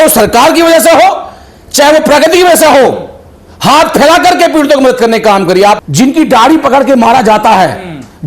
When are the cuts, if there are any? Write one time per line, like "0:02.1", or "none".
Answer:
0:05.8